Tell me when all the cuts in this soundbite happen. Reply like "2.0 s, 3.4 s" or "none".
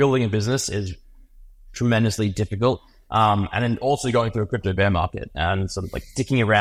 none